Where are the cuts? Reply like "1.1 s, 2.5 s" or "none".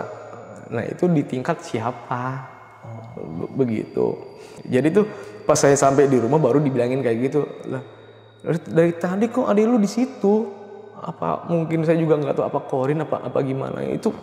4.5 s

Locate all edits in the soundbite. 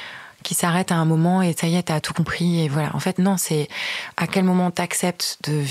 none

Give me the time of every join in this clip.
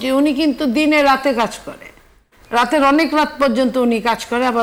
none

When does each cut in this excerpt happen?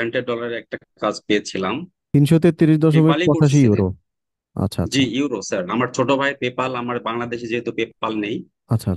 1.9 s

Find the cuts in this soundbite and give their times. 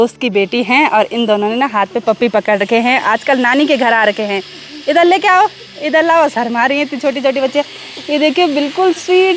none

